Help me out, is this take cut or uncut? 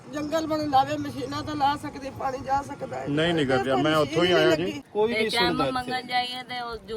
cut